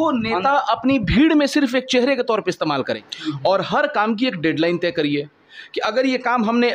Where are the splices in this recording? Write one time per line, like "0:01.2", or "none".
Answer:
0:03.0

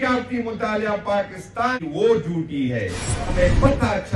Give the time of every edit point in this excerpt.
0:01.8
0:03.3

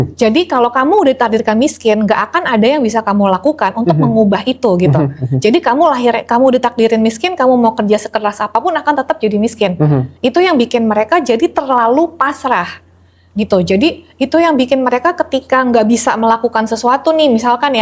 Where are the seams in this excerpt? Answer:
none

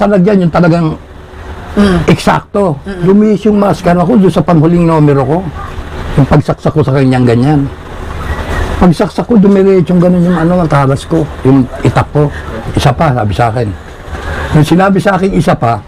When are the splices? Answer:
0:03.0
0:12.6

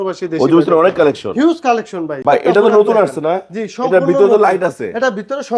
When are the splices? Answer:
0:02.1

